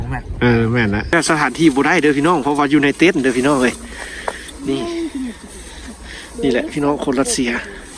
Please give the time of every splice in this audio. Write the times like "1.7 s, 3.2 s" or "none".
1.1 s